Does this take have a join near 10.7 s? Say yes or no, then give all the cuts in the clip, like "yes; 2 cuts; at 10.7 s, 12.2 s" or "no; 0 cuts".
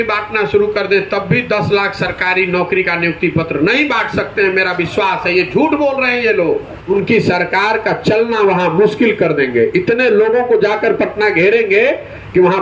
no; 1 cut; at 6.8 s